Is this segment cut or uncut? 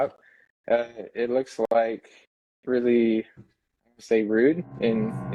uncut